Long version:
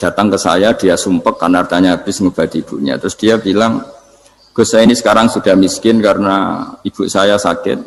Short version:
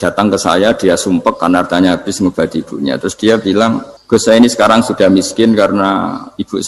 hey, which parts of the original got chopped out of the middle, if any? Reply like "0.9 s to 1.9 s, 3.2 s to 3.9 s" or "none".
3.9 s to 4.4 s